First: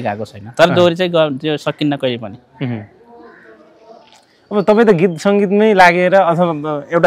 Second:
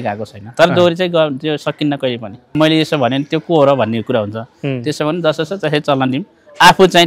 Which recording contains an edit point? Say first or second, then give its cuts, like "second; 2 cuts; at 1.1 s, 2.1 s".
second; 1 cut; at 2.4 s